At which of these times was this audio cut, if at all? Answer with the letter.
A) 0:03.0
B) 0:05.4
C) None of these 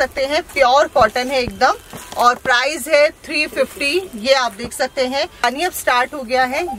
B